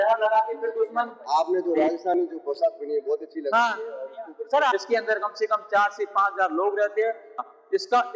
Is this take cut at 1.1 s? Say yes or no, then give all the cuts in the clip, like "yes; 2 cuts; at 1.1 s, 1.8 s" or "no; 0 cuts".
yes; 3 cuts; at 1.1 s, 4.7 s, 7.4 s